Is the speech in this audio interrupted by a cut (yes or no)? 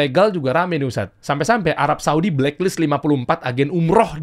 no